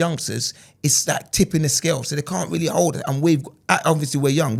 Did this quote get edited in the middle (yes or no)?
no